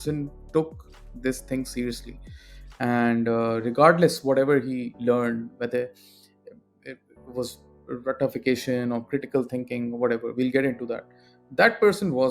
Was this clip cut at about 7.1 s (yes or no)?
no